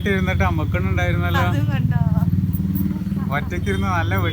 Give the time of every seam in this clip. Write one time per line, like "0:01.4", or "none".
none